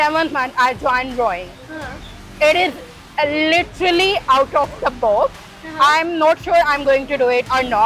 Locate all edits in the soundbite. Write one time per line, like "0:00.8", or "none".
none